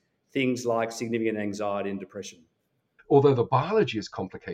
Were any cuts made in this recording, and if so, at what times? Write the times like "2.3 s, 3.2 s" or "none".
2.9 s